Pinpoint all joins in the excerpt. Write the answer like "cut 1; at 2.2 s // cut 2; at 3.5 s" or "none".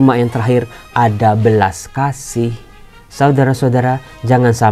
none